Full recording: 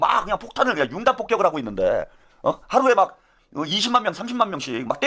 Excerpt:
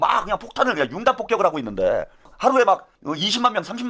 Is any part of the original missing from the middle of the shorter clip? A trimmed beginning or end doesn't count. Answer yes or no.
yes